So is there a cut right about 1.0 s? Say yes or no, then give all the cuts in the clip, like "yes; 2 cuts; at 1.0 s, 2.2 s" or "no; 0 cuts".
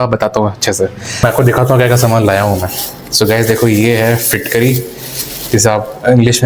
yes; 1 cut; at 1.0 s